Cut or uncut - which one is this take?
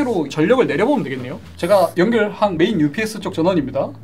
uncut